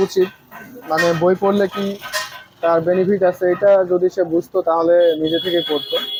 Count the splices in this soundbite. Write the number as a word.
zero